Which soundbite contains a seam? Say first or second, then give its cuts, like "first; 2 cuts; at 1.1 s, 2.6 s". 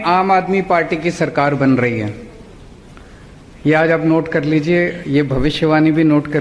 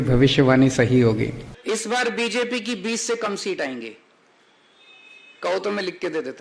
second; 1 cut; at 1.5 s